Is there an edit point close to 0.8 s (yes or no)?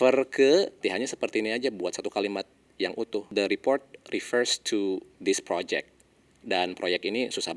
yes